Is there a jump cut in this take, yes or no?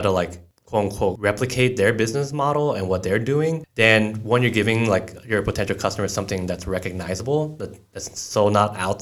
yes